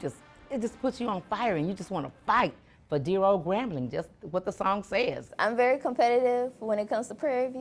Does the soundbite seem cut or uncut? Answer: cut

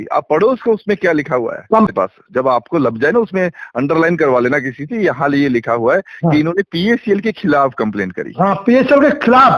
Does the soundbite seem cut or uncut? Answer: cut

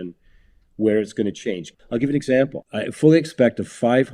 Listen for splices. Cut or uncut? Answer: cut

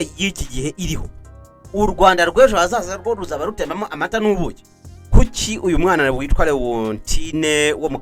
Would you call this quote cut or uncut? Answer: cut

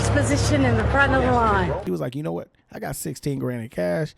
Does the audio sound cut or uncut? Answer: cut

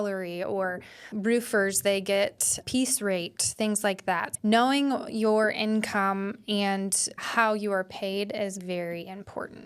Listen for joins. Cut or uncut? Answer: cut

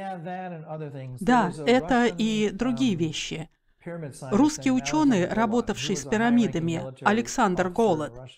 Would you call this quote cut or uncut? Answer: cut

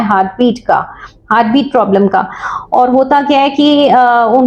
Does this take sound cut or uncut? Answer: uncut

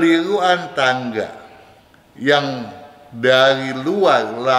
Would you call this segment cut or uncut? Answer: uncut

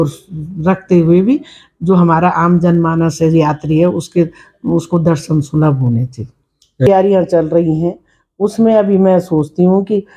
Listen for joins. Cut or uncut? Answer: cut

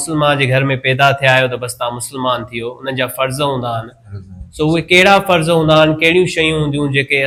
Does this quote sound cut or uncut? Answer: uncut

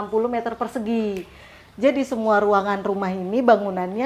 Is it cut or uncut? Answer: uncut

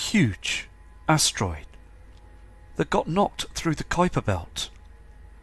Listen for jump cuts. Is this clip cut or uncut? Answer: cut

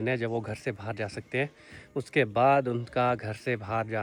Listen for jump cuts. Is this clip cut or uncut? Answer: uncut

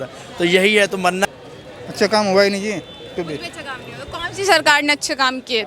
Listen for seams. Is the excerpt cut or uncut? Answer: cut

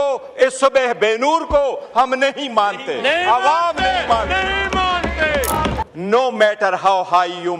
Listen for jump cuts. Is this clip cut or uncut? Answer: cut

